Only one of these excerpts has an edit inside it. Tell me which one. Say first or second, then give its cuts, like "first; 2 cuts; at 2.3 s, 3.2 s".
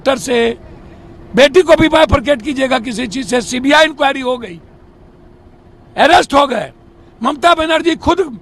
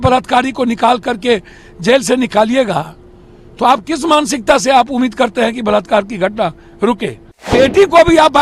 second; 1 cut; at 7.5 s